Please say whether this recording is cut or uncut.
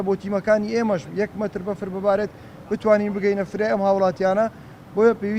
uncut